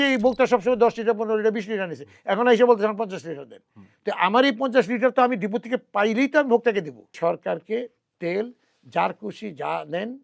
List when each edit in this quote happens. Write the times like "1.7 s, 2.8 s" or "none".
7.1 s